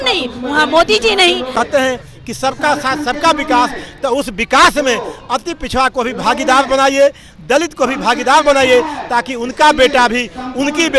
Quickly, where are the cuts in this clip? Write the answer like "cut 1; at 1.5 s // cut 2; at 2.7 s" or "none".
cut 1; at 1.5 s

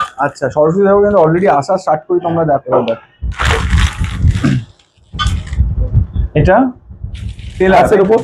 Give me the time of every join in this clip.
cut 1; at 2.6 s

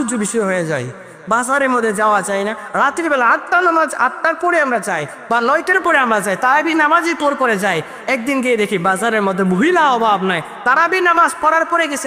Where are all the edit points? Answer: none

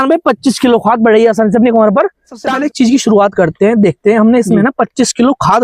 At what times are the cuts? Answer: cut 1; at 2.4 s

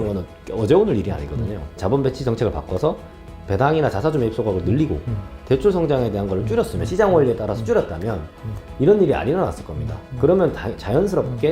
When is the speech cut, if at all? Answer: cut 1; at 1.8 s

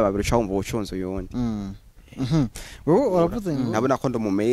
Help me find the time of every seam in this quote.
cut 1; at 3.4 s

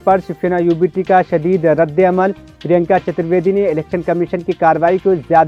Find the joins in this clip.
none

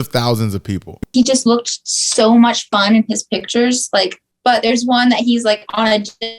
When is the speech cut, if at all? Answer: cut 1; at 1.1 s // cut 2; at 4.2 s

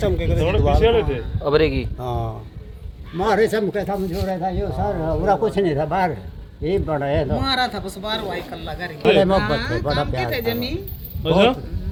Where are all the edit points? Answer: none

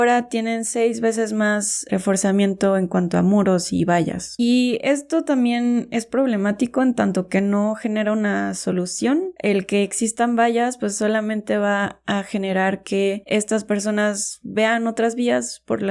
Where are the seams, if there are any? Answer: cut 1; at 4.2 s // cut 2; at 9.3 s

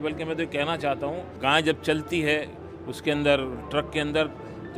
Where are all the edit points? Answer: cut 1; at 1.3 s

